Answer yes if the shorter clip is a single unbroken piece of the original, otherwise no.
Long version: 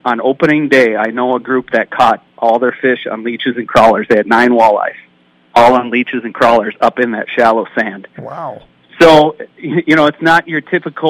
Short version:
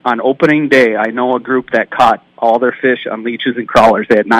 yes